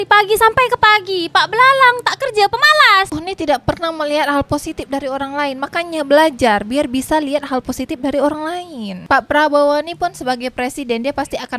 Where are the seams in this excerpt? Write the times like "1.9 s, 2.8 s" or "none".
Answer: 3.1 s, 8.9 s